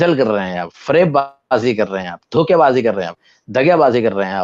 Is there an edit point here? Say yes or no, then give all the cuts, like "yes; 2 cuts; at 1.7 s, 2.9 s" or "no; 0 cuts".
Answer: no; 0 cuts